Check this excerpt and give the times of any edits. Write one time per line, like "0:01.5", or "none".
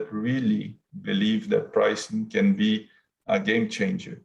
0:03.3

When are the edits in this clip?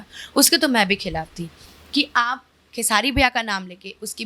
none

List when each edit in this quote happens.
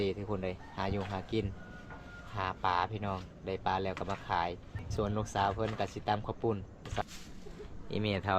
0:04.8
0:07.0

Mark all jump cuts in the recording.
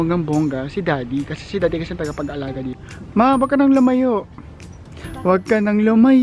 0:02.9

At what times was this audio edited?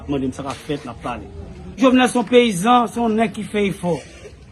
0:01.8

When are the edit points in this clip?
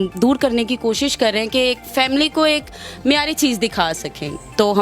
none

